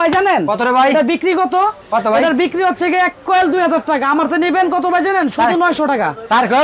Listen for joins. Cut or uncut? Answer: uncut